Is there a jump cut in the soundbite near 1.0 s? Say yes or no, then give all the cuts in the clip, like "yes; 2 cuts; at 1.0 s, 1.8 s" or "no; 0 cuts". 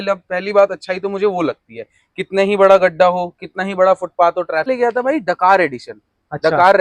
no; 1 cut; at 4.7 s